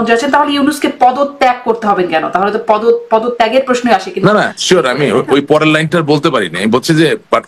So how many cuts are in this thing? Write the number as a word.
zero